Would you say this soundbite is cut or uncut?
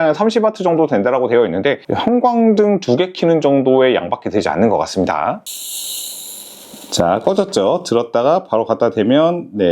cut